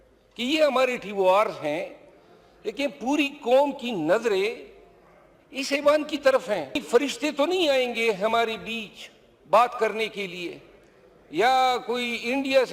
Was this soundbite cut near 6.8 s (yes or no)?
yes